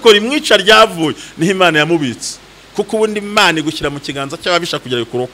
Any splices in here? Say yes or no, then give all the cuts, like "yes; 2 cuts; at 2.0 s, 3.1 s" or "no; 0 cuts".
no; 0 cuts